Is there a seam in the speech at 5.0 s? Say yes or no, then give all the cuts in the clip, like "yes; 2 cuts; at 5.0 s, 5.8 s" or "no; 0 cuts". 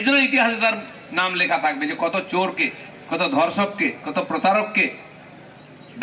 no; 0 cuts